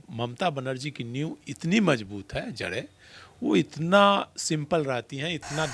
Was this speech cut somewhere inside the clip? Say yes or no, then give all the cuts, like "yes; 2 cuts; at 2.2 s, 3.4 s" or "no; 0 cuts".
no; 0 cuts